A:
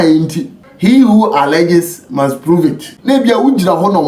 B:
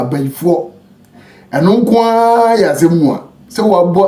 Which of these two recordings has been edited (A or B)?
A